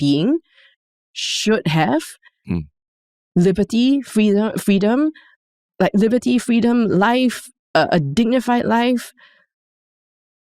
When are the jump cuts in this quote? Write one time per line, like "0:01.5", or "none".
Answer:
none